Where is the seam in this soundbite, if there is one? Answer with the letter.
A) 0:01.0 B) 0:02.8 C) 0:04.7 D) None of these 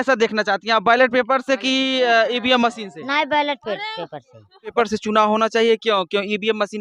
C